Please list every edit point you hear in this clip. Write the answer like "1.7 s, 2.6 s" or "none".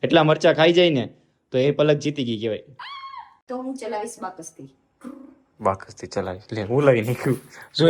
3.3 s